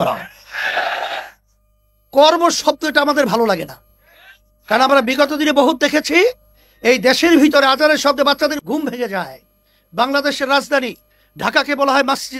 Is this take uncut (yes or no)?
no